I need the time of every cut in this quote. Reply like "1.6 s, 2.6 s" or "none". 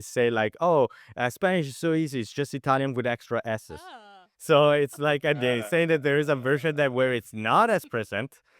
none

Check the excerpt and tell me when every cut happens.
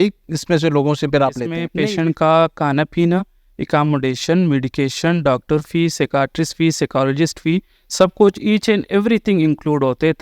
1.7 s

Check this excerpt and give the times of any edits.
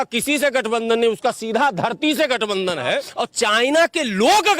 3.1 s

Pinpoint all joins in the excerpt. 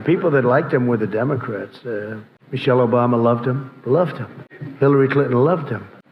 none

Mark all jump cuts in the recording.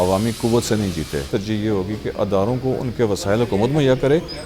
1.3 s

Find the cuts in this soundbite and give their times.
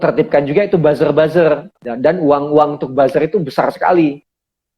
1.8 s

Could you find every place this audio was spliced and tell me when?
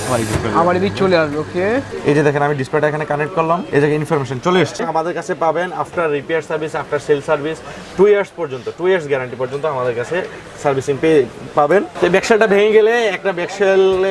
1.9 s, 4.7 s, 11.9 s

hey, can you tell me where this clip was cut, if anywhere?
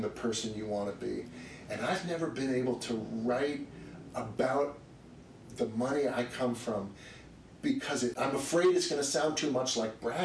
none

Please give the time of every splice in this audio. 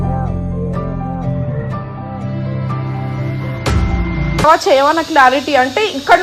4.4 s

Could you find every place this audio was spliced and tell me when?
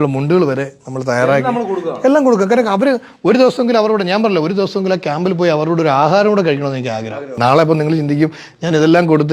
7.3 s

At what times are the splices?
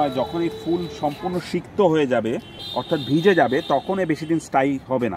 none

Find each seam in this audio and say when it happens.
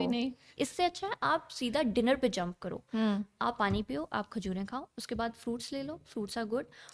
none

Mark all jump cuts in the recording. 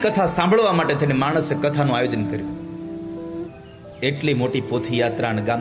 3.5 s

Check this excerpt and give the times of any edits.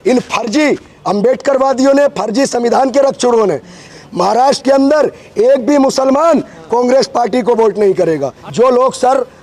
3.9 s, 8.4 s

